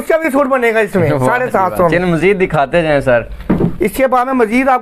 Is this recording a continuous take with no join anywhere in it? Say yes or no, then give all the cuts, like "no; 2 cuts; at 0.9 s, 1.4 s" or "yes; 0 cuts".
yes; 0 cuts